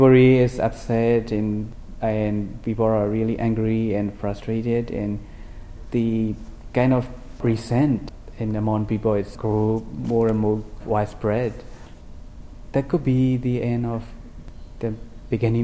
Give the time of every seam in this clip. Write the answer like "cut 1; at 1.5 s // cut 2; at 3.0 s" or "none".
cut 1; at 1.7 s